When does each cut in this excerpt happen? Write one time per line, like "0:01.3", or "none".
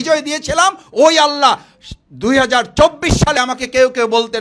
0:03.4